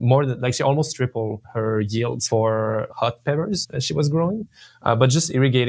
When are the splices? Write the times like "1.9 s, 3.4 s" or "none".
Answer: 1.4 s, 2.2 s, 2.9 s, 3.7 s